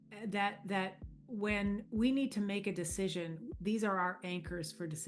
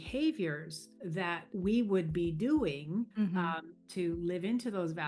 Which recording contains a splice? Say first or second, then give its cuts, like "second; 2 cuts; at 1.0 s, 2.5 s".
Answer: second; 2 cuts; at 1.3 s, 3.1 s